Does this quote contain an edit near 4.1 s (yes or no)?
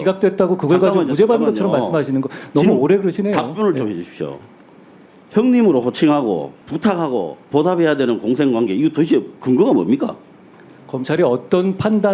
no